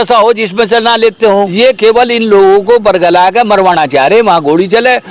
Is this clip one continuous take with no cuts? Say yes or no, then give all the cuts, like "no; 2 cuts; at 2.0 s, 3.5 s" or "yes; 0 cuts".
no; 1 cut; at 1.5 s